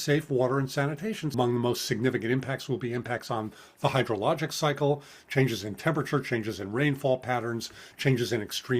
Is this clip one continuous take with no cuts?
no; 1 cut; at 1.3 s

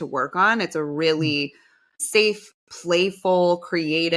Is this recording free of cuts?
no; 1 cut; at 2.0 s

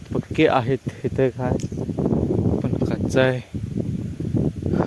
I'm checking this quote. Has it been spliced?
no; 0 cuts

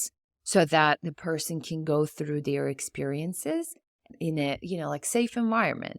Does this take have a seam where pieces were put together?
yes; 1 cut; at 4.1 s

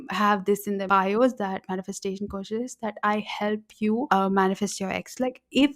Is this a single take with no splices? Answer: no; 2 cuts; at 0.8 s, 4.1 s

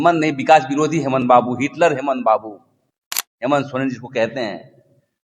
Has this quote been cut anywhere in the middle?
no; 0 cuts

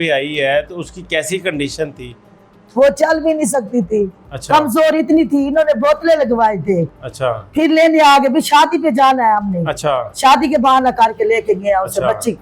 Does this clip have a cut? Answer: no; 0 cuts

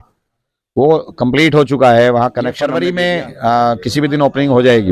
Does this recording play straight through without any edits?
no; 1 cut; at 2.6 s

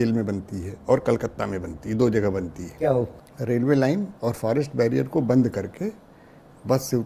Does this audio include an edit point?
yes; 1 cut; at 3.1 s

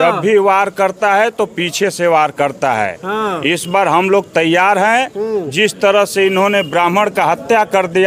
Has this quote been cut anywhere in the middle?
no; 0 cuts

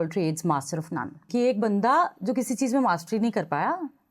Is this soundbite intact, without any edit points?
no; 1 cut; at 1.2 s

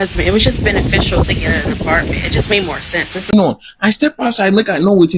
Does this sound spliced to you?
yes; 1 cut; at 3.3 s

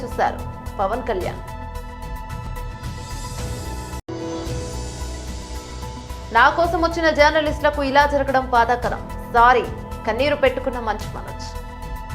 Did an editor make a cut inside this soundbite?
no; 0 cuts

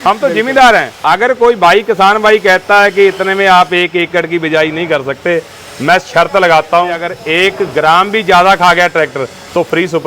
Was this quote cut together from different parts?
yes; 2 cuts; at 0.9 s, 7.1 s

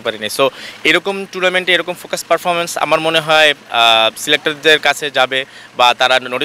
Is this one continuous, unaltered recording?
yes; 0 cuts

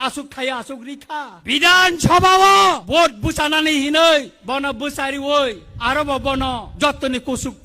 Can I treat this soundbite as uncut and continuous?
no; 5 cuts; at 1.4 s, 2.8 s, 4.4 s, 5.7 s, 6.7 s

